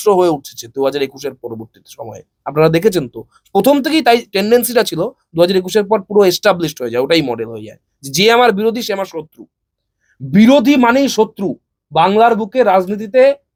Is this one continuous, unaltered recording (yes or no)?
yes